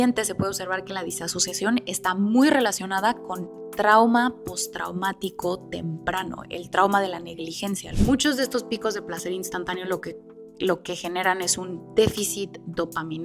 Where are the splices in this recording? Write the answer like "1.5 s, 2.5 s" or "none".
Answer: 7.9 s